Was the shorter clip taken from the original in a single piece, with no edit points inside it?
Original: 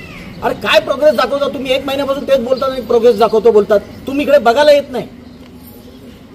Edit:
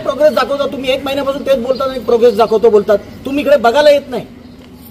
yes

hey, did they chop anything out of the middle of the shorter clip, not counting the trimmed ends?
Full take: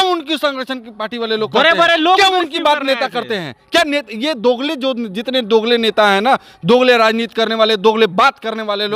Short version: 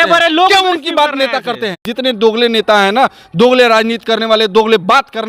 yes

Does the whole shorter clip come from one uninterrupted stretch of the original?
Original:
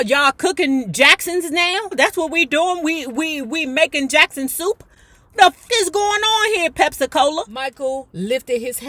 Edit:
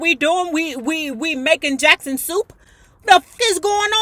yes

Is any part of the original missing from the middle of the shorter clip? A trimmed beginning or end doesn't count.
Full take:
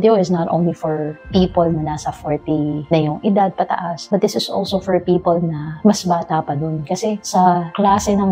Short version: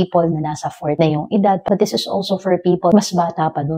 yes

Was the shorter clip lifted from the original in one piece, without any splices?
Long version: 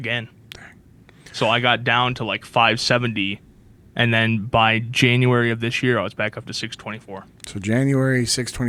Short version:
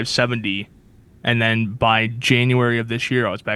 yes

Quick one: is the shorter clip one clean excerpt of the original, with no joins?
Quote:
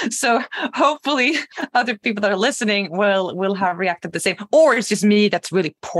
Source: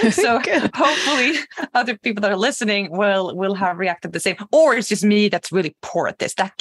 yes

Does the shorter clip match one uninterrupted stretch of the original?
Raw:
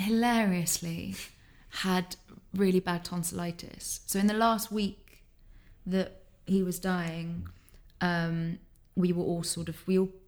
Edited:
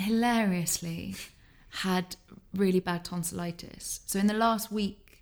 yes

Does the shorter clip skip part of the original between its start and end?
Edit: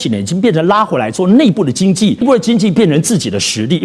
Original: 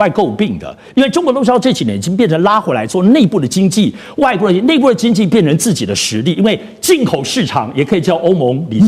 yes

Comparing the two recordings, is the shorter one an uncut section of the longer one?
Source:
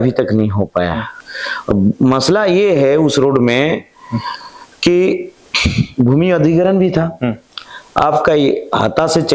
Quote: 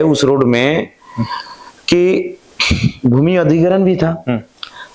yes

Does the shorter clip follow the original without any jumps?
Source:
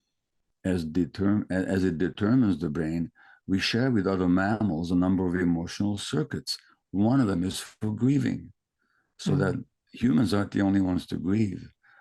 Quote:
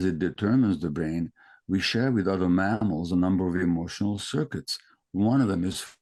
yes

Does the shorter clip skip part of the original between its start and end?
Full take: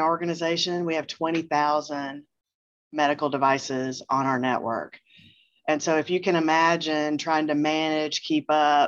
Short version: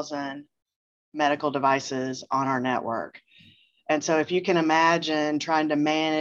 no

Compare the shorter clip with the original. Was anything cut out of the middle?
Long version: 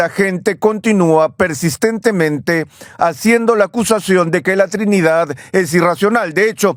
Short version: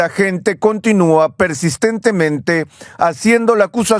no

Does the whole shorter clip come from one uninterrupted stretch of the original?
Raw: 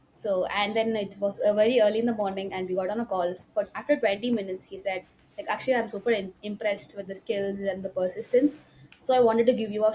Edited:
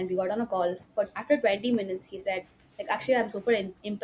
yes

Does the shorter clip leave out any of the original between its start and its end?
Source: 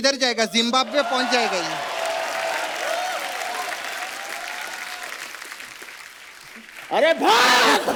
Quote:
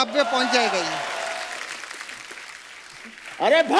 yes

